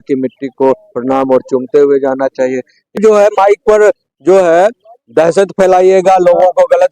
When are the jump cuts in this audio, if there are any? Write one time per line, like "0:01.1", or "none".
0:02.9